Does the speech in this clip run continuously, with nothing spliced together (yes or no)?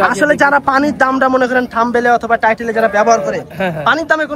yes